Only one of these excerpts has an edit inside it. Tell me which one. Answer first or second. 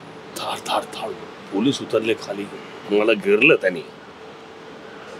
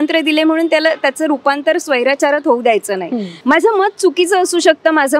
second